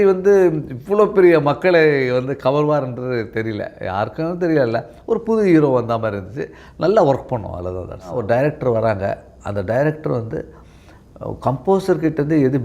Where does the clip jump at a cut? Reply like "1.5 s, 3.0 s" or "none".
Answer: 8.2 s

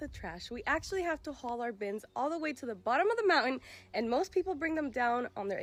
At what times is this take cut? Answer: none

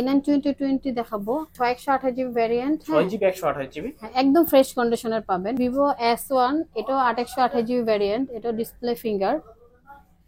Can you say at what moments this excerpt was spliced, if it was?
1.5 s, 5.6 s

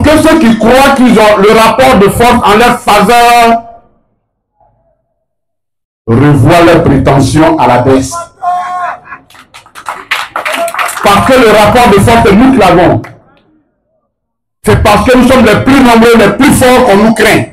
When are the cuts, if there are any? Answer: none

